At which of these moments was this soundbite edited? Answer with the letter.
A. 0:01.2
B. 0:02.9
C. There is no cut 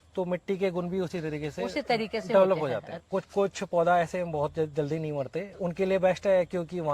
B